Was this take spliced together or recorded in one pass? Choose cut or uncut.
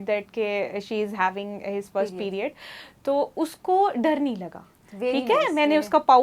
uncut